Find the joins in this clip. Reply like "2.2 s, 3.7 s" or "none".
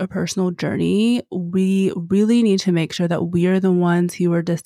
none